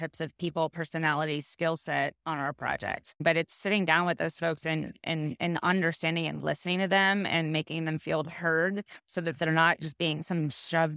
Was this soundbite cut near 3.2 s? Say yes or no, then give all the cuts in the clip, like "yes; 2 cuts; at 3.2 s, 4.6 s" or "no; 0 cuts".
yes; 1 cut; at 3.2 s